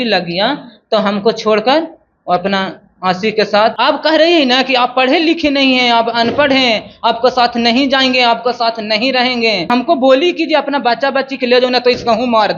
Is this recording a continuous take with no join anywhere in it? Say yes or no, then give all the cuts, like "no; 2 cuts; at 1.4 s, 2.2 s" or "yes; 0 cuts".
no; 2 cuts; at 3.7 s, 9.7 s